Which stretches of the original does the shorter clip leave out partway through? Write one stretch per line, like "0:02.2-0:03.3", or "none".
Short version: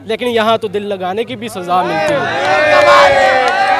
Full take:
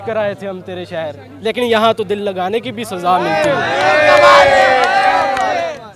none